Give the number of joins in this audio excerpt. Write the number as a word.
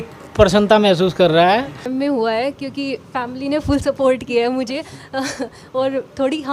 one